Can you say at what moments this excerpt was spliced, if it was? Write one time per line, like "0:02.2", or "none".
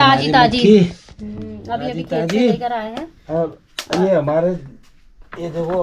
none